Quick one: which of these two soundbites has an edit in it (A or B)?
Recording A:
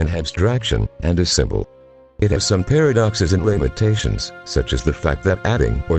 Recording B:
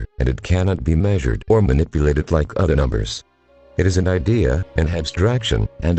A